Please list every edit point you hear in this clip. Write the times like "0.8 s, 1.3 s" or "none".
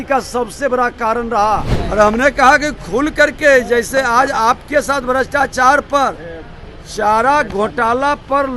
1.8 s